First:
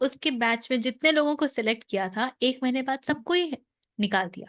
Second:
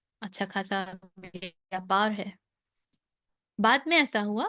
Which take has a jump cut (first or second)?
second